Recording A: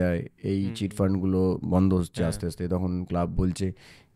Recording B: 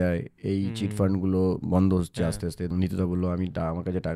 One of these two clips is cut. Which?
B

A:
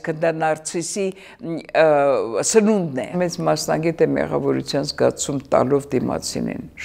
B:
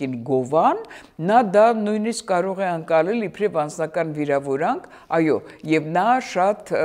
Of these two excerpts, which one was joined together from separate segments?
A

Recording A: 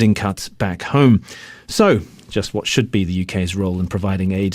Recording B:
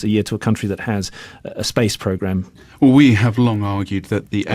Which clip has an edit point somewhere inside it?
A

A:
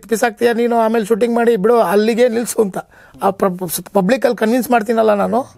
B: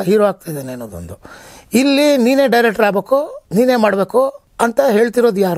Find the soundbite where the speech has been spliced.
B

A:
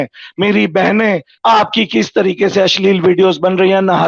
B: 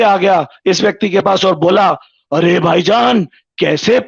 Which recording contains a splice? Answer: A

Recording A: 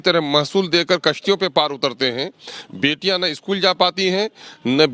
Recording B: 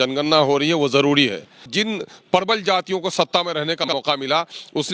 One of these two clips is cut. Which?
B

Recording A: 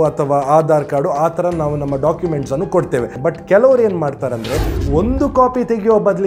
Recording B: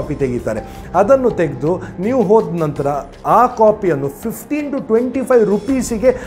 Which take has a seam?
A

